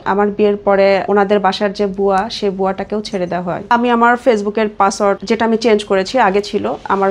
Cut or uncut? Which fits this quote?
cut